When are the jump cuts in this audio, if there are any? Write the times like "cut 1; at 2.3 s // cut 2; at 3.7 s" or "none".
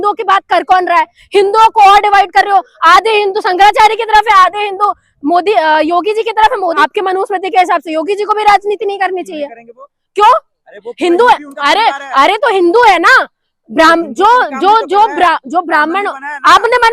cut 1; at 6.8 s